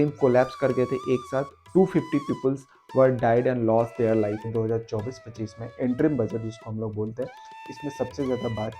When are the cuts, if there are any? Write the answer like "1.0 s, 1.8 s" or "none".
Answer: 1.6 s, 4.5 s

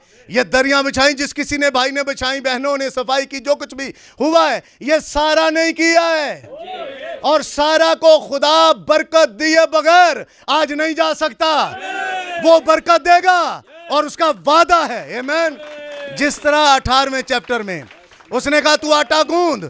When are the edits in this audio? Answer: none

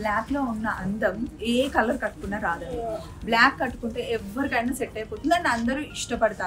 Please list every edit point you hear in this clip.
none

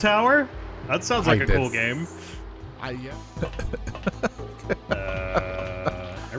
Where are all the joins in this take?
2.7 s

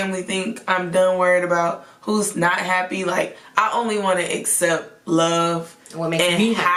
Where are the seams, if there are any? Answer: none

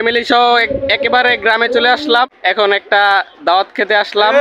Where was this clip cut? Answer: 2.3 s

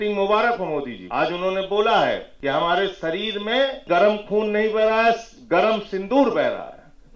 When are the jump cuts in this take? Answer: 1.0 s, 2.3 s, 3.8 s

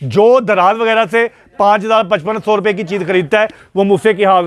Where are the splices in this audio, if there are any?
none

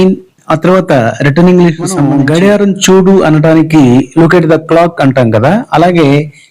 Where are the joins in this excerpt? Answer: 2.0 s

